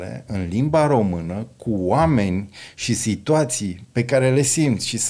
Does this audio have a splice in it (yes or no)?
no